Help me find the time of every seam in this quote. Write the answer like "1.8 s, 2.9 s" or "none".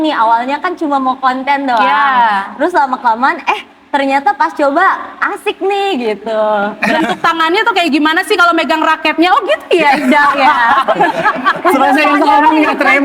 6.8 s